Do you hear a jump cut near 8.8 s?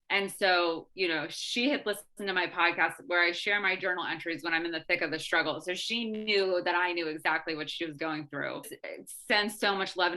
yes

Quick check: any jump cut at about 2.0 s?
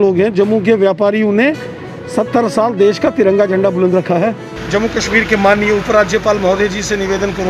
no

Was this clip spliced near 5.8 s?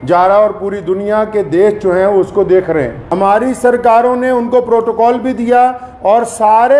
no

